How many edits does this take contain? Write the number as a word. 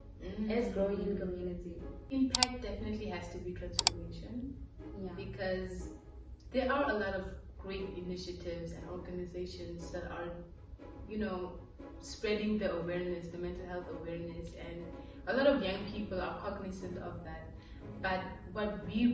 one